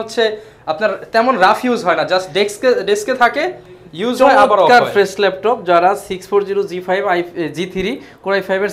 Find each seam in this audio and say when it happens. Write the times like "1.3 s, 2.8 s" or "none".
none